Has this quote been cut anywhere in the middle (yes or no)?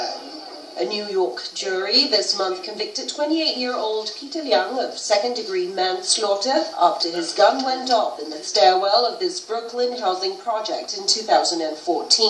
yes